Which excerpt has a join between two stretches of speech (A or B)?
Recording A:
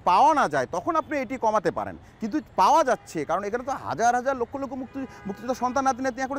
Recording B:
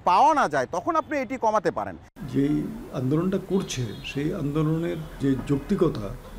B